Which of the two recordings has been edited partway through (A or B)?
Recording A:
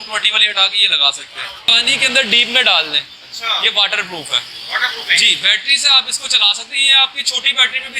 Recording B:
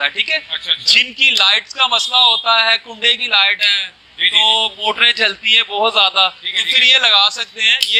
A